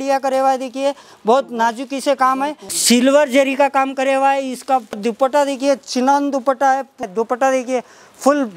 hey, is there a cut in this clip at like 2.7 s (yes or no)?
yes